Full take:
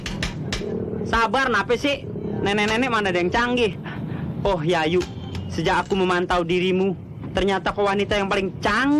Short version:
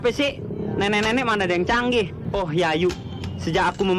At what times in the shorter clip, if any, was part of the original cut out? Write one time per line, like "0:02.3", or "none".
0:02.2